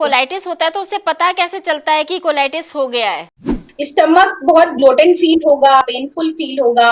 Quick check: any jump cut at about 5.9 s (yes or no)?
yes